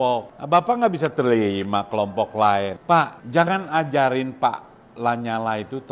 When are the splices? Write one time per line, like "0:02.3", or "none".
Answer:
none